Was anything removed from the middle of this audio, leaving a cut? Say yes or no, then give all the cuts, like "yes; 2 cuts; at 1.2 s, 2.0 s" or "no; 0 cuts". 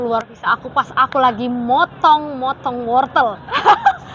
no; 0 cuts